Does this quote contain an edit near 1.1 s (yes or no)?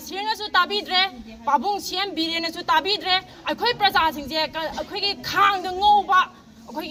no